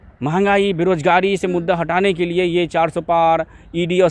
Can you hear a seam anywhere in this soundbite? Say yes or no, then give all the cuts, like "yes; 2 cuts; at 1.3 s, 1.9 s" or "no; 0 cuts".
no; 0 cuts